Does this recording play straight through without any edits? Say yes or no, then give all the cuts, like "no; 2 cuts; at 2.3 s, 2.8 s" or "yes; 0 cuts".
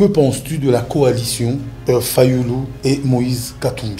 no; 2 cuts; at 1.7 s, 2.7 s